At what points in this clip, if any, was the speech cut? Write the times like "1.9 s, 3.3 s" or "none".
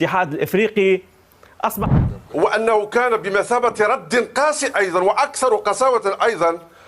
1.8 s